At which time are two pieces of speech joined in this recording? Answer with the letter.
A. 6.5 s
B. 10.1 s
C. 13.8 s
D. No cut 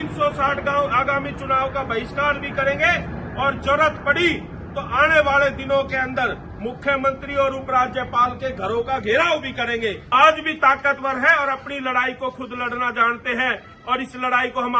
B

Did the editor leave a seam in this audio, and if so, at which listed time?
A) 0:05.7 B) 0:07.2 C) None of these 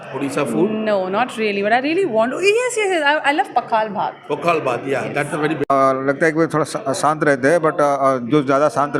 A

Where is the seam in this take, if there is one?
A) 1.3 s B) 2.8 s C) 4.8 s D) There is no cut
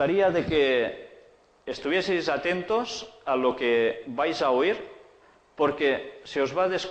B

